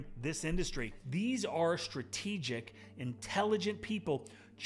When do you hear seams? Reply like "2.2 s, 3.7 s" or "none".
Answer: 0.9 s